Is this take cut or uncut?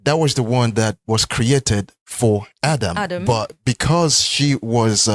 uncut